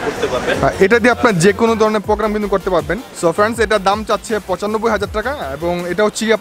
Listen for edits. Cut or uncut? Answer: cut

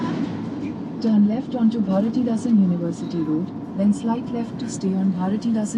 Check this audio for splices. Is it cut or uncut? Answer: uncut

